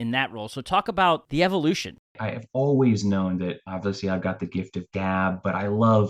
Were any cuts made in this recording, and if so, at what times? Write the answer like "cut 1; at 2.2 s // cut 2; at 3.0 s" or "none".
cut 1; at 1.3 s // cut 2; at 2.1 s